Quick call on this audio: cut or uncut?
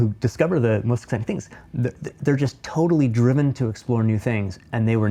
uncut